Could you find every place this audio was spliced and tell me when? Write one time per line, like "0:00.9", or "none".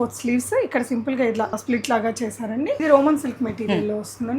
0:01.6
0:02.8